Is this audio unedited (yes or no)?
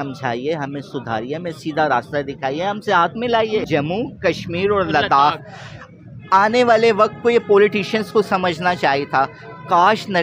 no